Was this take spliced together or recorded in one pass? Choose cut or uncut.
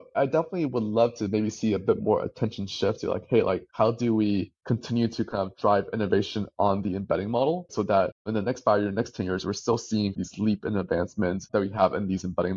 uncut